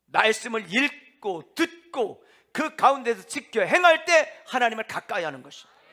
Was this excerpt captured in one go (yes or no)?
yes